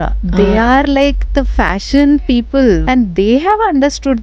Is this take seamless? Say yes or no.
no